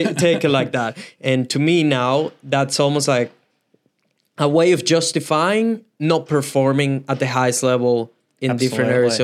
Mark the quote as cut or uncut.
uncut